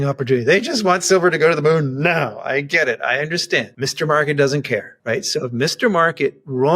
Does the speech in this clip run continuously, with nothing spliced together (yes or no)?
no